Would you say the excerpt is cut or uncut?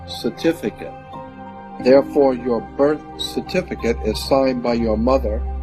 cut